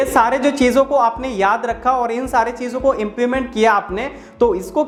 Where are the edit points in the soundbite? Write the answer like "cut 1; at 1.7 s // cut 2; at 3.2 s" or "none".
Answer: none